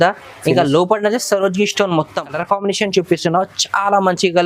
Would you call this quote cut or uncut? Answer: cut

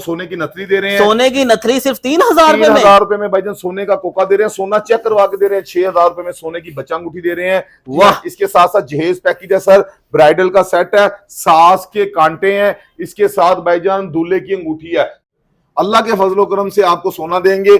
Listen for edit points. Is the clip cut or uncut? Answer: cut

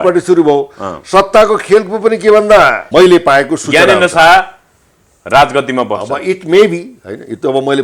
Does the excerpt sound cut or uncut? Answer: cut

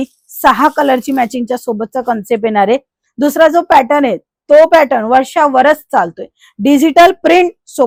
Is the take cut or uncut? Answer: uncut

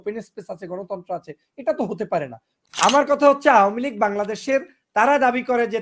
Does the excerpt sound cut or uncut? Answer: cut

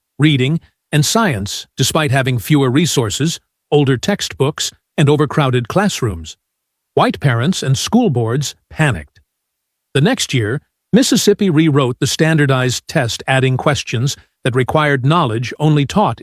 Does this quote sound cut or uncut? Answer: uncut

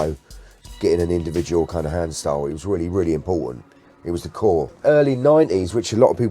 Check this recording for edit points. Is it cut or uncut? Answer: cut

